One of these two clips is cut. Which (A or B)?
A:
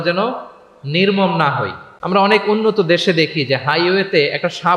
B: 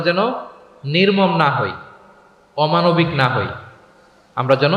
A